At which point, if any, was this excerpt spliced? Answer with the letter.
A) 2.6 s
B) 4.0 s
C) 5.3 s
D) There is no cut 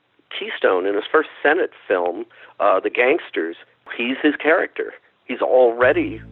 B